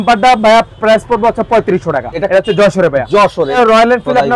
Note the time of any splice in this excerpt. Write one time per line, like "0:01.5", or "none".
0:02.1
0:03.6

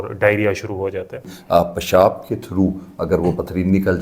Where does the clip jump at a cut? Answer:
0:01.3

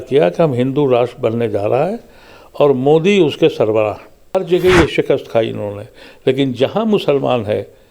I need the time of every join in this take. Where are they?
0:04.2

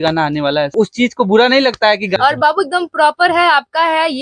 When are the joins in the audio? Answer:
0:00.8
0:02.1

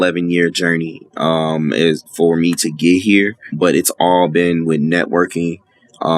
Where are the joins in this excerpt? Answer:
0:03.5

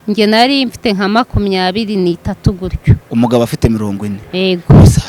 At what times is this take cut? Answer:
none

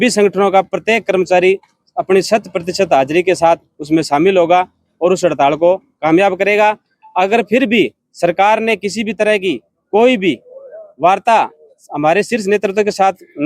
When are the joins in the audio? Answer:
none

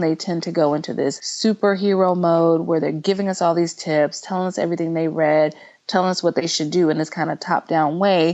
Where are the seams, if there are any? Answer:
0:01.3

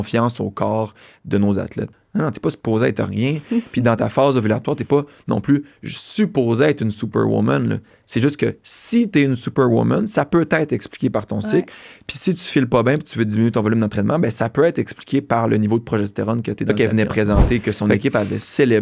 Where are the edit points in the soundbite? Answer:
0:01.9
0:16.7

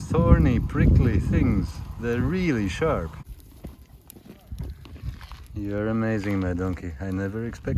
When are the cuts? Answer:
0:03.2

